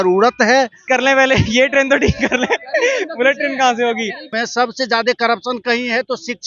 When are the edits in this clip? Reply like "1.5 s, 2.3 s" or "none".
0.8 s, 4.3 s